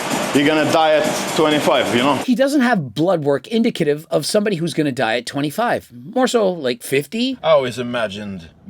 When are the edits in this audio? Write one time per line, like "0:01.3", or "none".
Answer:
0:02.2
0:07.4